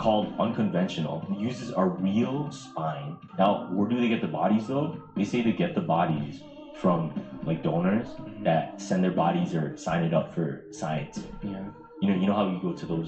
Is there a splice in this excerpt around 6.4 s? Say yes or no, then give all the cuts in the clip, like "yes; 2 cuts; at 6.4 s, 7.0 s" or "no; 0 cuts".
no; 1 cut; at 3.2 s